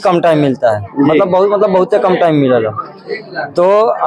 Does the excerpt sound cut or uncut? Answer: uncut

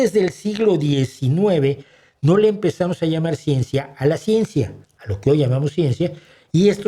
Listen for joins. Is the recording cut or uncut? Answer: uncut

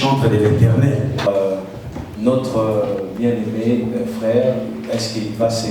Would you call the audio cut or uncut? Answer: cut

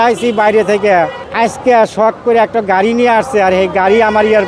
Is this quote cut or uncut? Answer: cut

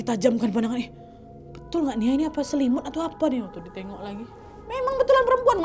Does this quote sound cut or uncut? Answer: uncut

